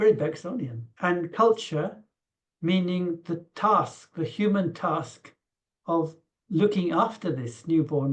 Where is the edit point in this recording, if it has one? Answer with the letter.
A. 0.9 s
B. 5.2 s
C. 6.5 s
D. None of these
A